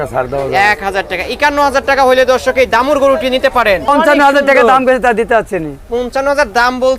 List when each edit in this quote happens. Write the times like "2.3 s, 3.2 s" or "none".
3.9 s

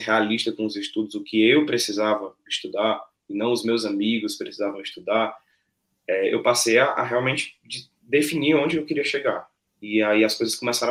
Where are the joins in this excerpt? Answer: none

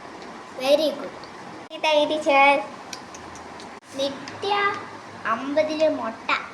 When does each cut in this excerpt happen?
none

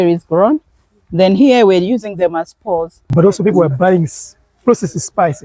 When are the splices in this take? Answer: 3.0 s

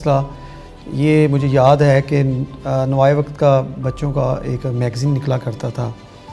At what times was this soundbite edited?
none

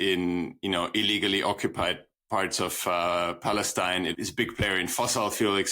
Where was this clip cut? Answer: 4.1 s

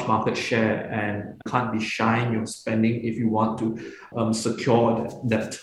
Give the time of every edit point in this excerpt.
1.5 s, 4.1 s

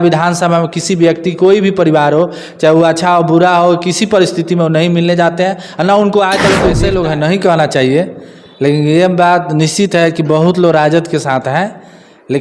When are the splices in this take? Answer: 6.8 s

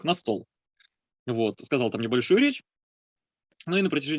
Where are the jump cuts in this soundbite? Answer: none

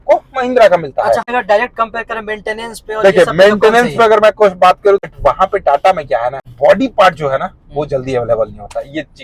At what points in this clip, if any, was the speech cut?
1.2 s, 5.1 s, 6.5 s

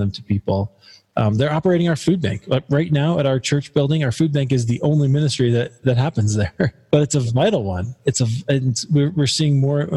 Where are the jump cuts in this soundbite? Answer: 6.8 s

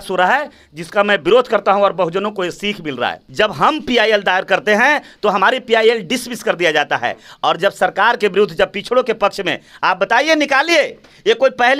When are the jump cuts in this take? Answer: 3.2 s

